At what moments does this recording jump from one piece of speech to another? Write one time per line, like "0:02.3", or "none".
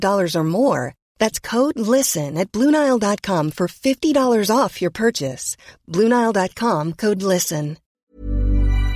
0:07.9